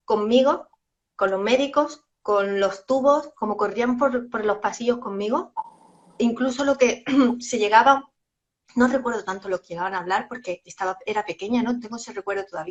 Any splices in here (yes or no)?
no